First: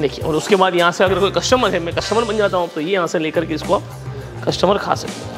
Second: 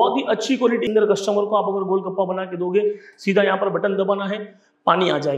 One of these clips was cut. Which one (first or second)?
second